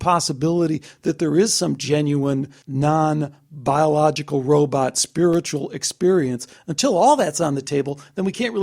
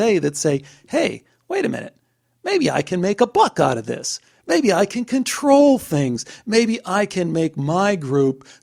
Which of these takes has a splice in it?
first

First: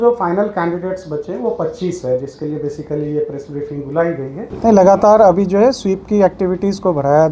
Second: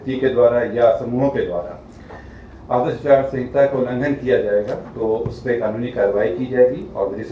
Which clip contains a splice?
first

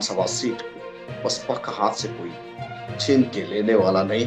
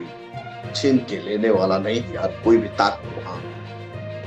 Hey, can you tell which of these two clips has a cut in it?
second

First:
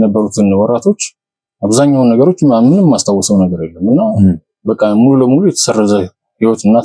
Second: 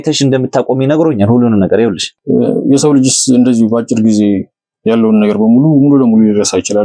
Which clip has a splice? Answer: second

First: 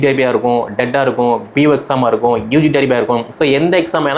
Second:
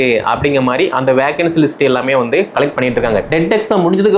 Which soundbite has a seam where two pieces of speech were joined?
second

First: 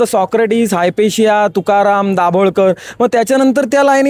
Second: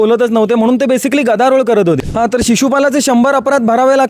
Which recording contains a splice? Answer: second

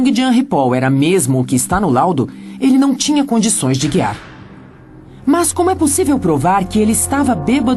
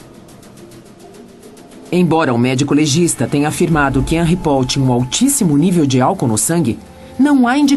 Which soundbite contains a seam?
first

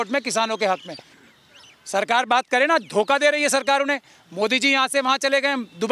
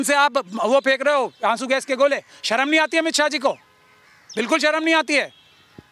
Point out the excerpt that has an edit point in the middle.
first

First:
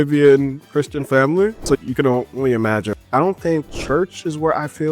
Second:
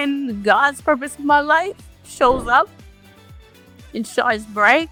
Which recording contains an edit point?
first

